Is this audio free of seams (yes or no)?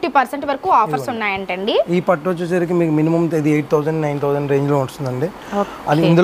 yes